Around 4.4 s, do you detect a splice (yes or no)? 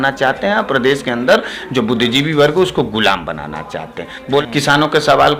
yes